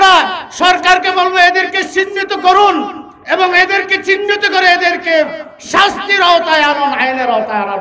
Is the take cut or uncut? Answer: uncut